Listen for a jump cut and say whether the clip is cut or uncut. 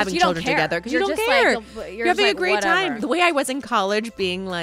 cut